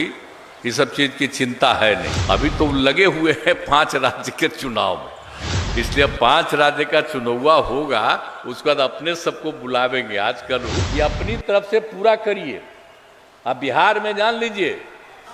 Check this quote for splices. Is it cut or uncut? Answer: cut